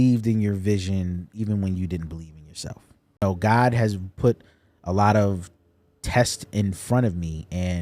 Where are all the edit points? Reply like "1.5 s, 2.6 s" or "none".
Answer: 3.2 s